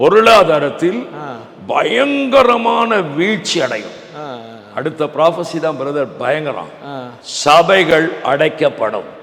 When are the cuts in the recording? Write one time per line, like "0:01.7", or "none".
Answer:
none